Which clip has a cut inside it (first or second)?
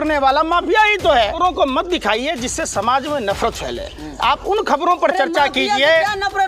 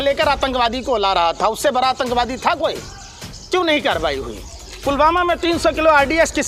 first